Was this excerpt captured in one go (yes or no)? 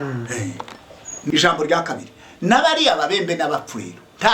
no